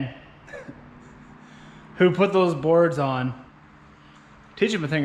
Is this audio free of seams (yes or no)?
yes